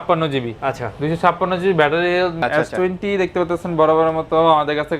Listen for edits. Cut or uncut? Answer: cut